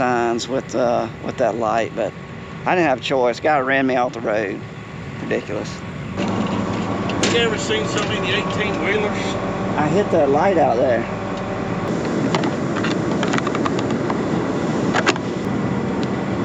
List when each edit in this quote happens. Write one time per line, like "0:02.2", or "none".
none